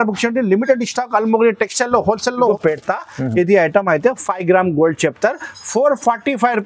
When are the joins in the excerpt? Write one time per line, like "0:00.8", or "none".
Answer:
0:02.5